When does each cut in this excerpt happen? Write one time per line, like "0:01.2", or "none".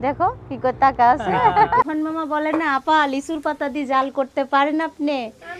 0:01.9